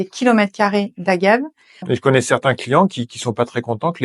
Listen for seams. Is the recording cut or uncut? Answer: cut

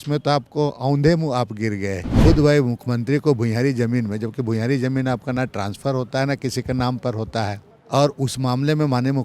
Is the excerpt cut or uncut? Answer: cut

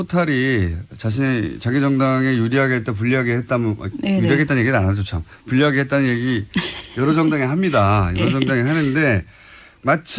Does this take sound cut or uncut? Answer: uncut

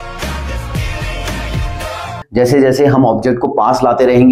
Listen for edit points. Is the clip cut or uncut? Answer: cut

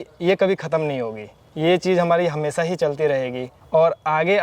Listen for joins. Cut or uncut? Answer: uncut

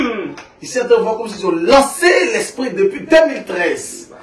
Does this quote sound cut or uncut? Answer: uncut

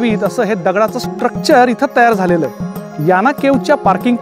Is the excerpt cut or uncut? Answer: uncut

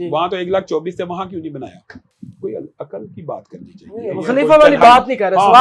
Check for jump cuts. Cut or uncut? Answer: uncut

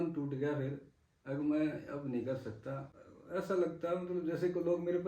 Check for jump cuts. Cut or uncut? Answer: cut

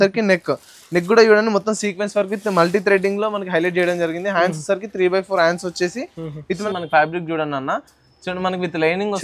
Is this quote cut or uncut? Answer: cut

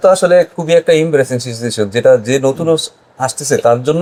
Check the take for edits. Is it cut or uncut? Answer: uncut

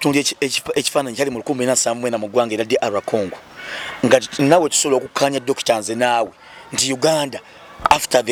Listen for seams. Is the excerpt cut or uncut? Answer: uncut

